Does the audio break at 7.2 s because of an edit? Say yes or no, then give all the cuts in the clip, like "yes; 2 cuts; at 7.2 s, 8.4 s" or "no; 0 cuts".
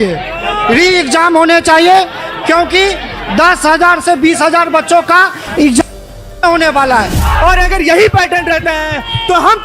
yes; 1 cut; at 7.2 s